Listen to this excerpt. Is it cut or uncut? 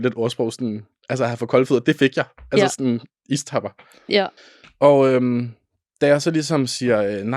cut